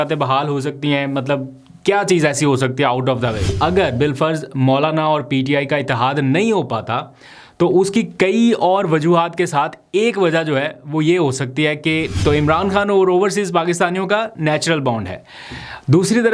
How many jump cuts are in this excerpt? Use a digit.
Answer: 2